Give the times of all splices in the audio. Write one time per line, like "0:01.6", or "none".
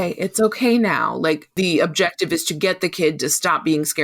0:01.5